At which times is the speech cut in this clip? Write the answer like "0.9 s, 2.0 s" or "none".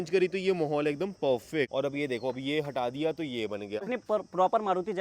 1.7 s, 3.9 s